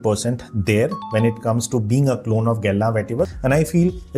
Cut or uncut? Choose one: cut